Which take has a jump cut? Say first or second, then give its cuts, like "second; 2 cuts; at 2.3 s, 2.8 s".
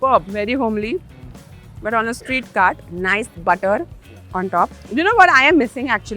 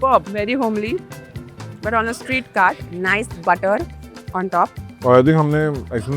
first; 1 cut; at 4.8 s